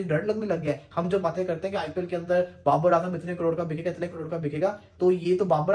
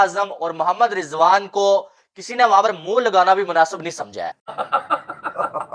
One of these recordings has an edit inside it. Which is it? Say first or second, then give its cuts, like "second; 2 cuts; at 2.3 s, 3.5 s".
second; 1 cut; at 4.5 s